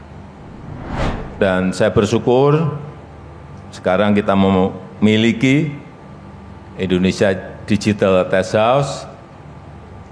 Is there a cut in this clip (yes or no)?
yes